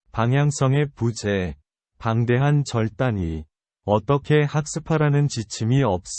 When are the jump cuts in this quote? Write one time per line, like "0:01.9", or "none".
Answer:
0:04.0